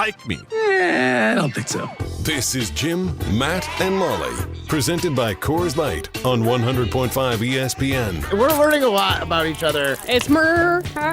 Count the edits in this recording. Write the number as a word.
one